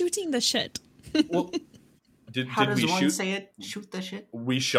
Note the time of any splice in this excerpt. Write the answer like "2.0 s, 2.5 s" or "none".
none